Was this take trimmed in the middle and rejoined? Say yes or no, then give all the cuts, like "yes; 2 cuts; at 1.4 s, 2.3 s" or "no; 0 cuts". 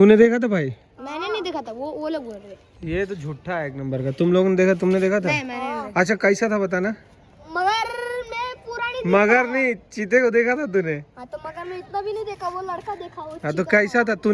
no; 0 cuts